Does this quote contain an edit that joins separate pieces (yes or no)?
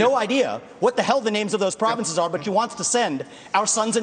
no